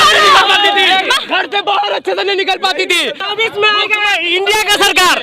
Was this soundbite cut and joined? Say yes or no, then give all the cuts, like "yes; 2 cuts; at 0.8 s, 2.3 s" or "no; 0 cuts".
yes; 1 cut; at 3.2 s